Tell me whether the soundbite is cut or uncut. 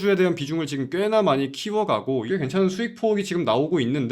uncut